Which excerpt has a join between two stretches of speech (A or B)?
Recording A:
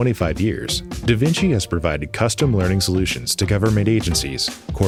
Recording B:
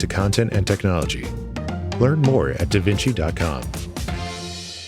B